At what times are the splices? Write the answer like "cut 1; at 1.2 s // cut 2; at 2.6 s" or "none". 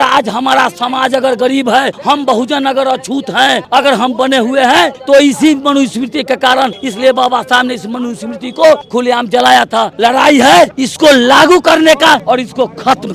cut 1; at 1.9 s // cut 2; at 3.6 s // cut 3; at 5.0 s // cut 4; at 6.8 s // cut 5; at 8.8 s // cut 6; at 9.9 s // cut 7; at 10.8 s // cut 8; at 12.2 s

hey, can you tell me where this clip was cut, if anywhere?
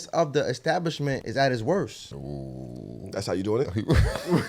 cut 1; at 1.2 s // cut 2; at 2.1 s

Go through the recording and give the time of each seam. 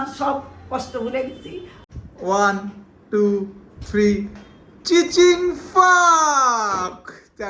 cut 1; at 1.7 s

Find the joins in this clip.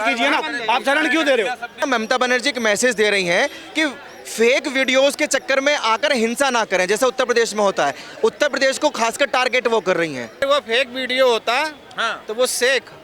cut 1; at 1.8 s // cut 2; at 10.4 s

